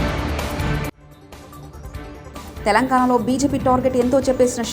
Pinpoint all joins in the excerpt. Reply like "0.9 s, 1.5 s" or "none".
2.4 s

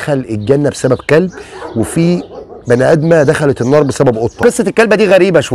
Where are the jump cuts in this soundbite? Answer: 4.4 s

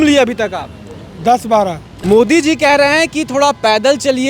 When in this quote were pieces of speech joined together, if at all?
1.9 s

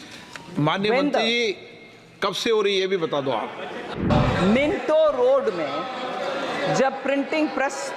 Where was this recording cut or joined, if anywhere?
3.9 s

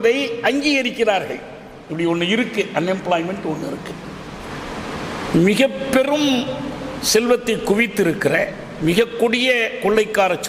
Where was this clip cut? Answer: 4.5 s

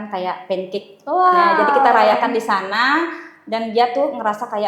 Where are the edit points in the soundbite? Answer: none

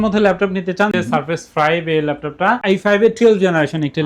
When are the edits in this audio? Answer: 0.9 s

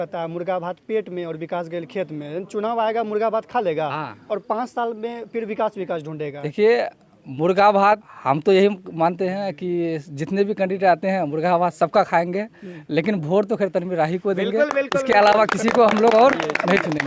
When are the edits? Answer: 6.4 s, 8.1 s

